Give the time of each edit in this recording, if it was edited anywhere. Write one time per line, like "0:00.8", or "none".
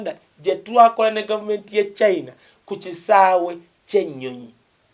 none